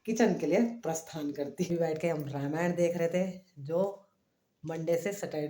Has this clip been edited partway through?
yes; 1 cut; at 1.7 s

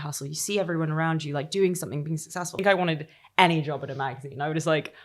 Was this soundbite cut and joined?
yes; 1 cut; at 2.6 s

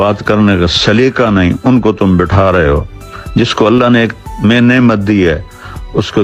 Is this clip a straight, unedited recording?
yes; 0 cuts

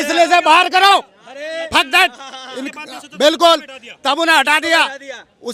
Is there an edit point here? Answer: no; 0 cuts

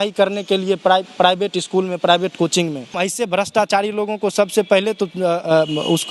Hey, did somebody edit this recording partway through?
yes; 1 cut; at 2.9 s

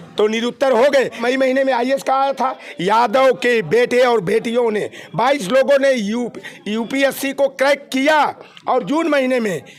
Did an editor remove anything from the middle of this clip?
yes; 1 cut; at 1.2 s

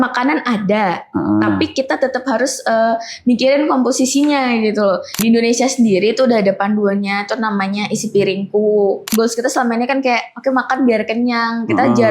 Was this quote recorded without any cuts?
no; 2 cuts; at 5.2 s, 9.1 s

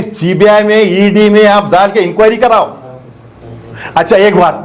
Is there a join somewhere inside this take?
no; 0 cuts

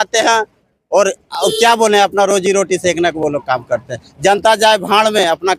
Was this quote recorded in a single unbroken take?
yes; 0 cuts

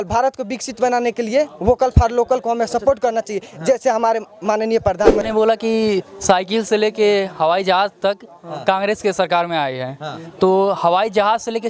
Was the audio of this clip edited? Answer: yes; 1 cut; at 5.2 s

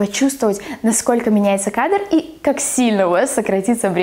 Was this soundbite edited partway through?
no; 0 cuts

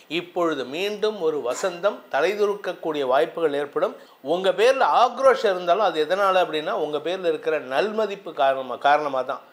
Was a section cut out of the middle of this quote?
yes; 1 cut; at 4.1 s

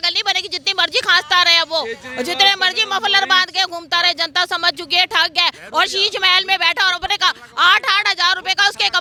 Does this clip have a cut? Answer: no; 0 cuts

